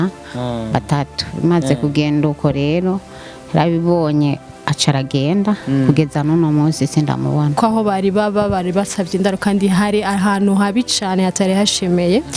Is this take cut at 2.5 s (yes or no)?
no